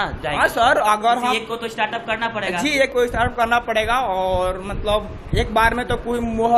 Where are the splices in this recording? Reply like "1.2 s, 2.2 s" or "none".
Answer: none